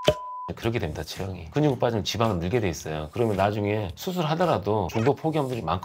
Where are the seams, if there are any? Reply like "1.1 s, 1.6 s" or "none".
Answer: 1.5 s, 4.9 s